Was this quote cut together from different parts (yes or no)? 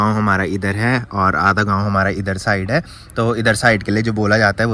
no